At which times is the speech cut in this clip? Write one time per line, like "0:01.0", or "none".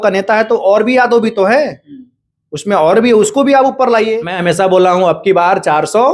0:04.3